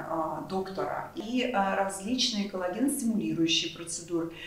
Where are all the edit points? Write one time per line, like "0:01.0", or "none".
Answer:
0:01.2